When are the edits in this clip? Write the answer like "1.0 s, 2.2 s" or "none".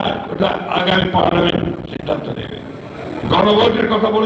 3.0 s